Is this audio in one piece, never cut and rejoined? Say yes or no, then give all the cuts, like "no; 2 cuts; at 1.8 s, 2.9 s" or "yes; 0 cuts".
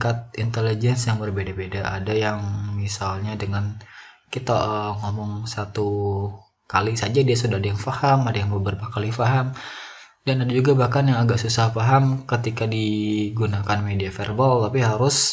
yes; 0 cuts